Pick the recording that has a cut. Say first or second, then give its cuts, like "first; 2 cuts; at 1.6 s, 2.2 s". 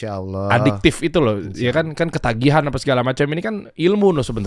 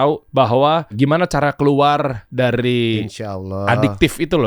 second; 2 cuts; at 0.9 s, 2.2 s